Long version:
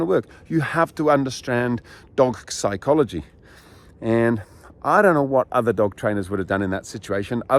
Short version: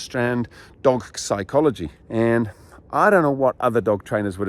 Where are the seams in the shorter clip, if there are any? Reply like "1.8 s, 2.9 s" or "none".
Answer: 1.9 s